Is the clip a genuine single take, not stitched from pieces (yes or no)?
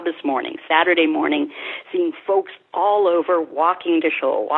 yes